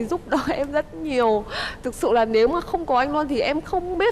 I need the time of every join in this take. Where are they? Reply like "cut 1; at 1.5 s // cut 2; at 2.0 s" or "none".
none